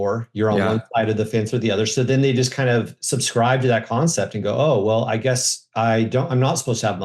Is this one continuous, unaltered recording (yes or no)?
yes